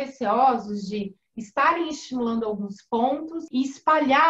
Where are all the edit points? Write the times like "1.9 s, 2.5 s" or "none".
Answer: 3.4 s